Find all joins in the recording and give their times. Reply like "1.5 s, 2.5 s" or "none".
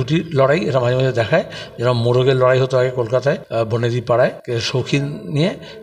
3.4 s, 4.4 s